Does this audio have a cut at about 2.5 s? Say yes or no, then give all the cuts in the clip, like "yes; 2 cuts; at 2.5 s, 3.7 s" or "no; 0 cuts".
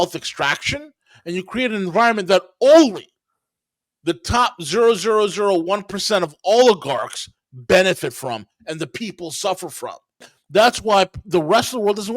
no; 1 cut; at 10.3 s